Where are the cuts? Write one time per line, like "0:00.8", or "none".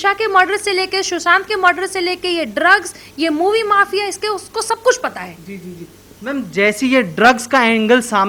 none